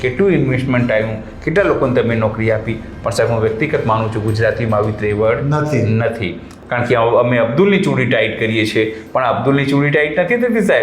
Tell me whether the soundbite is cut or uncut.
cut